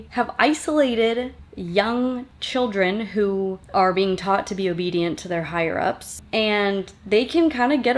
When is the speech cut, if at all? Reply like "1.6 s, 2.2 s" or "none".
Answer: 6.1 s